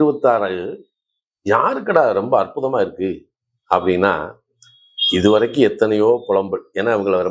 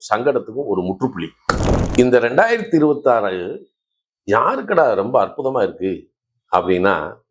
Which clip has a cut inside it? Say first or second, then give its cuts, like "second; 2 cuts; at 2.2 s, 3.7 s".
second; 1 cut; at 1.7 s